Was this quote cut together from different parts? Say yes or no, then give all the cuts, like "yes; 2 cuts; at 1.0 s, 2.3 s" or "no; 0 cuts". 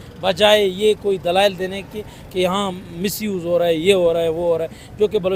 no; 0 cuts